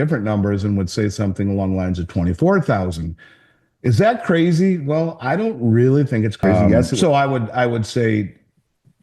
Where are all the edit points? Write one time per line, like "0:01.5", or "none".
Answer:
0:06.9